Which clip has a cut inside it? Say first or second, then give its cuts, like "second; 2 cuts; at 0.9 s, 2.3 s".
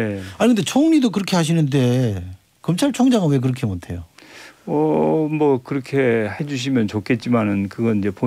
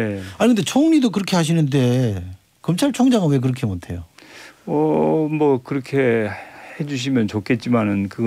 first; 1 cut; at 6.4 s